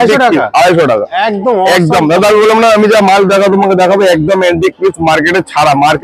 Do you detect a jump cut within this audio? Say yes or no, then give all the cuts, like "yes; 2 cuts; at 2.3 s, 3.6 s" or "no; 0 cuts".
no; 0 cuts